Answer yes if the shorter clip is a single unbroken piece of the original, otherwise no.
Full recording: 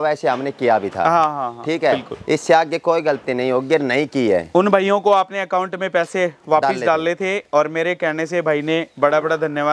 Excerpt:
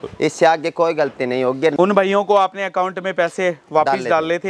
no